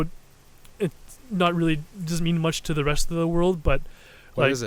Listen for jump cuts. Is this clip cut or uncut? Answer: uncut